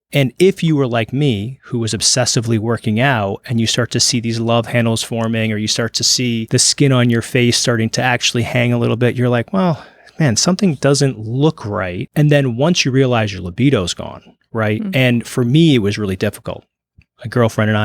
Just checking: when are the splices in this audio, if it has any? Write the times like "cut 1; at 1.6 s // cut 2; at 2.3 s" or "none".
cut 1; at 6.5 s // cut 2; at 12.0 s